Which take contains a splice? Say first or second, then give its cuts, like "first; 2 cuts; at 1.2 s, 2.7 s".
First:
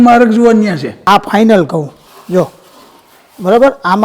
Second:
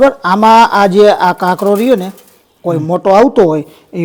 first; 1 cut; at 1.0 s